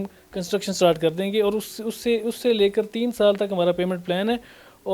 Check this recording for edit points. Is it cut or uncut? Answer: uncut